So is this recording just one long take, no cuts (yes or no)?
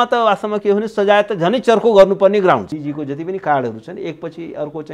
no